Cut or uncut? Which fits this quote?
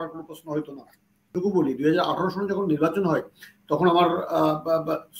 cut